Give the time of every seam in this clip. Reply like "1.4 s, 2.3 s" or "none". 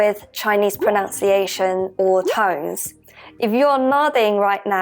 none

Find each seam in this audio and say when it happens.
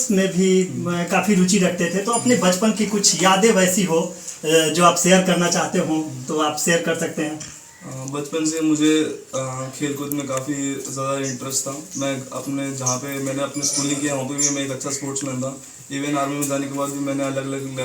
none

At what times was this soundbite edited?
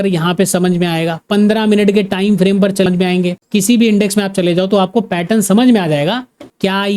2.9 s

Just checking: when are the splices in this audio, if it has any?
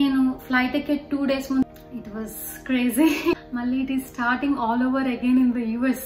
1.6 s, 3.3 s

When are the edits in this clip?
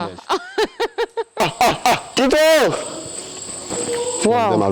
1.4 s, 2.1 s, 3.6 s

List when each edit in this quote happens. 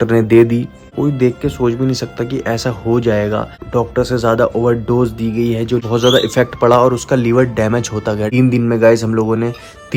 0.9 s, 3.6 s, 5.8 s, 8.3 s

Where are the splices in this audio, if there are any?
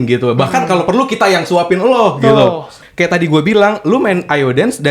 2.8 s

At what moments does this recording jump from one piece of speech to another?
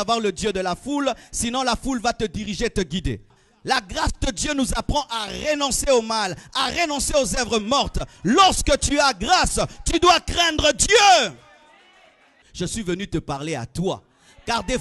3.4 s, 12.3 s

